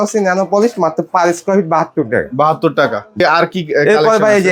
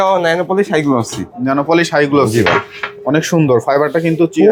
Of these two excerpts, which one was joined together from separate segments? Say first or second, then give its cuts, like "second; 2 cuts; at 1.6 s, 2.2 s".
first; 1 cut; at 3.2 s